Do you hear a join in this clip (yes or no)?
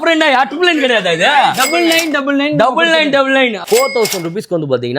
yes